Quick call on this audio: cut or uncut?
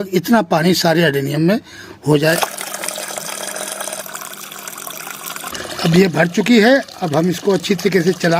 cut